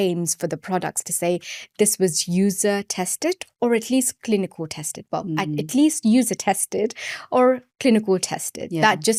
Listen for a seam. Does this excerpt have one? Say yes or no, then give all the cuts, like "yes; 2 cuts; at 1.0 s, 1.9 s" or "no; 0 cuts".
no; 0 cuts